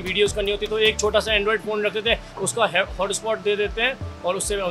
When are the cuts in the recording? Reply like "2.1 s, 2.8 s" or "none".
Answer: none